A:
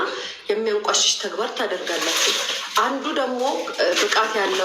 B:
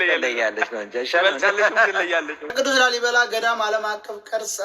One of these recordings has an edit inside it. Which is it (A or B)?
B